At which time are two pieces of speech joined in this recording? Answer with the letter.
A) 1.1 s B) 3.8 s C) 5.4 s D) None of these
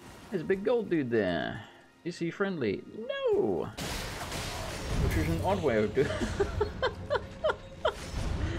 B